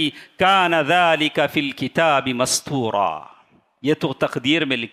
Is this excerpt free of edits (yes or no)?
yes